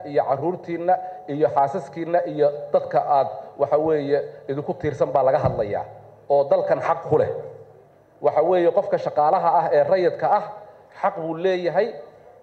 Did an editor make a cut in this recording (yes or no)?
no